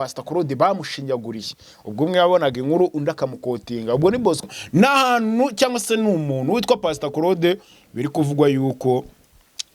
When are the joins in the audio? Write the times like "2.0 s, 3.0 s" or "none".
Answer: 4.4 s